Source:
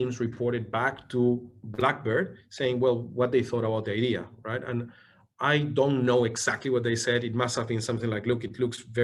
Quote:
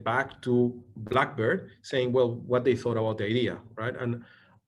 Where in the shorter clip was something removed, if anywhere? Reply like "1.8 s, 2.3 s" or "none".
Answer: none